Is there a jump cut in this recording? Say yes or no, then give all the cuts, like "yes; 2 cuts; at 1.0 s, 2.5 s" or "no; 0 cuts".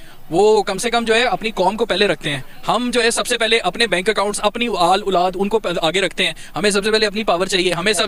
no; 0 cuts